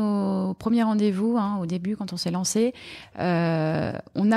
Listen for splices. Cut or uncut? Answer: uncut